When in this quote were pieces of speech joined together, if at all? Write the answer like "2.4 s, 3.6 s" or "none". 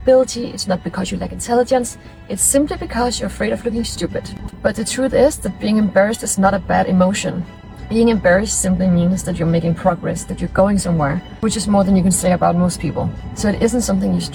none